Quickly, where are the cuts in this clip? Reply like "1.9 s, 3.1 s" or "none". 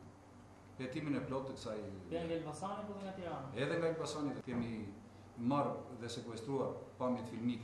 4.4 s